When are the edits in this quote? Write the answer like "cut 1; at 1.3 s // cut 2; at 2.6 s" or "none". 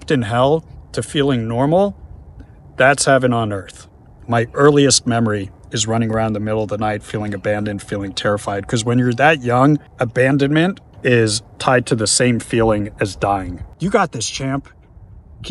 cut 1; at 4.2 s // cut 2; at 9.9 s // cut 3; at 10.9 s // cut 4; at 13.6 s

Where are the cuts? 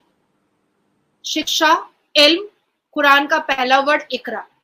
none

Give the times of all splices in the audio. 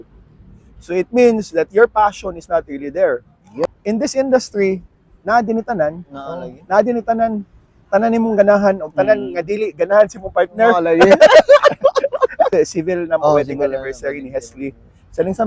cut 1; at 3.8 s // cut 2; at 12.5 s

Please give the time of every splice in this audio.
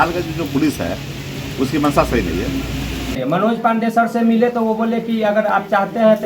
cut 1; at 3.2 s

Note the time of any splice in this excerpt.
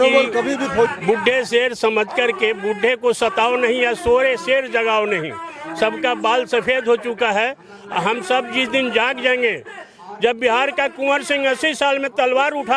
cut 1; at 0.9 s

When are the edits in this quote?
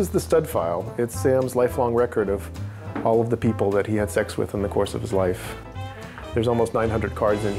cut 1; at 5.7 s

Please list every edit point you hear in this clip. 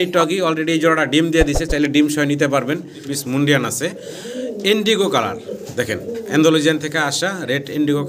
cut 1; at 3.1 s

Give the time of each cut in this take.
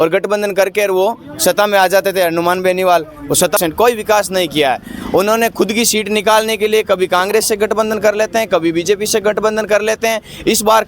cut 1; at 3.6 s

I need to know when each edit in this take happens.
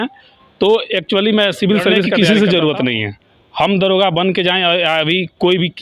cut 1; at 2.1 s

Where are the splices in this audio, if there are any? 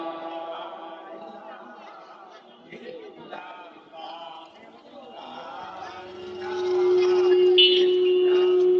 none

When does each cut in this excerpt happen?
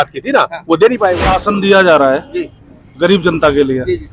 cut 1; at 1.3 s

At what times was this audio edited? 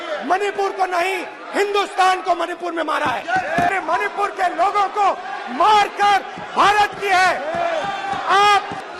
cut 1; at 3.7 s

